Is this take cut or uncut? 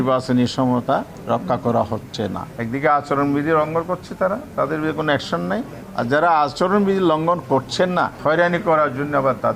cut